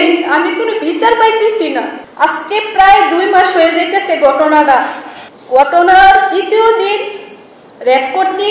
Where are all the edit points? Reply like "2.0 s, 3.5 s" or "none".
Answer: none